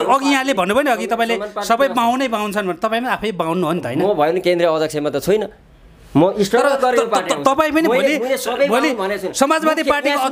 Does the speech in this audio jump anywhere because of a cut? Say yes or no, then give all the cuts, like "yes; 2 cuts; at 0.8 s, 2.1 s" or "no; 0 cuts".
no; 0 cuts